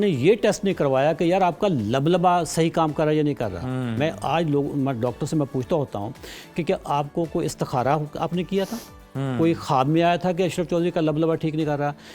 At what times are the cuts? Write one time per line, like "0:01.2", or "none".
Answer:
none

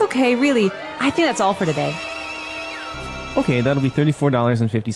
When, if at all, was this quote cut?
0:02.9

